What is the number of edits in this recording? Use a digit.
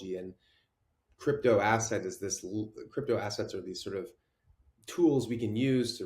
0